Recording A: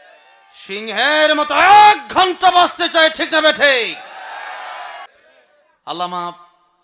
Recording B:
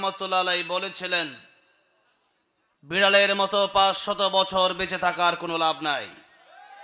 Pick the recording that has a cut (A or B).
A